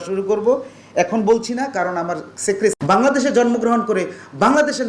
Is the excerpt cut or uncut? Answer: cut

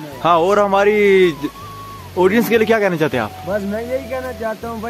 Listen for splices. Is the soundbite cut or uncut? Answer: uncut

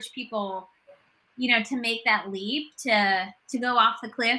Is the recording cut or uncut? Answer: uncut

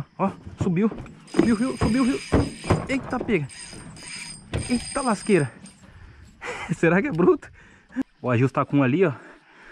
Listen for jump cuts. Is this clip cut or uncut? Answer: cut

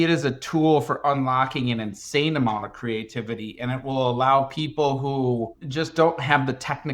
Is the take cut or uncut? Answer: cut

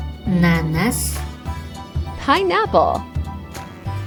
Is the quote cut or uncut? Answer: uncut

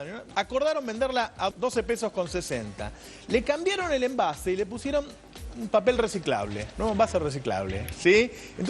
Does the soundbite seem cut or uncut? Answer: cut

